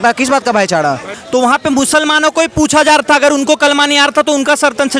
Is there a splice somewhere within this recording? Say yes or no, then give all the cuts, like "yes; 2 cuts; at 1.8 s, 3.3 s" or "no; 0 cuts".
yes; 1 cut; at 1.2 s